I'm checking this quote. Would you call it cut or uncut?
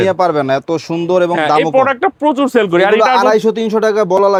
uncut